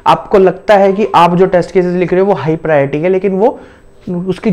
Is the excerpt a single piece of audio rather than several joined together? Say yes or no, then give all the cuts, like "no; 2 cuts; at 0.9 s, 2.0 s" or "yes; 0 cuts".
yes; 0 cuts